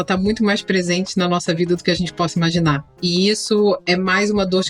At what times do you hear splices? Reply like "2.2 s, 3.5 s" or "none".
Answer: 2.9 s